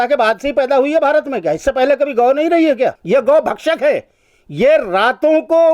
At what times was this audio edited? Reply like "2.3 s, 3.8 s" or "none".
3.0 s